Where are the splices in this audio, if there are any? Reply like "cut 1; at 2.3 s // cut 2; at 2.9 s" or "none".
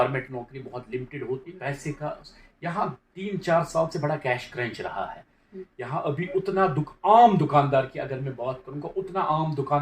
cut 1; at 1.5 s

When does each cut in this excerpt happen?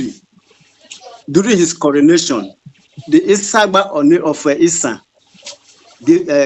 none

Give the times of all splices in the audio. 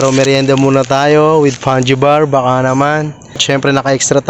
cut 1; at 3.4 s

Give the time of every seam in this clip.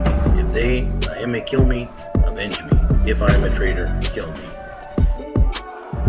cut 1; at 4.6 s

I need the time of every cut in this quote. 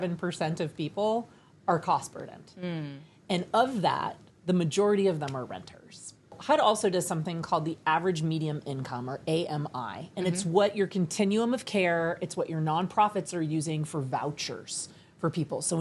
cut 1; at 6.4 s

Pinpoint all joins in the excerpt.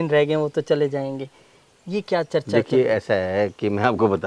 none

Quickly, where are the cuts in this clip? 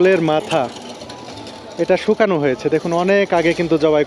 none

